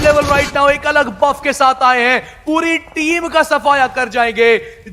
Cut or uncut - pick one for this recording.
uncut